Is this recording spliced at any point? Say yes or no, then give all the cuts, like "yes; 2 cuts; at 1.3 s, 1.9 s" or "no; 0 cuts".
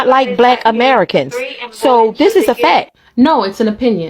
no; 0 cuts